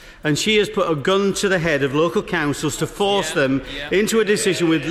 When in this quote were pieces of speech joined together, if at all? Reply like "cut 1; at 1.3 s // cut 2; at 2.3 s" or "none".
none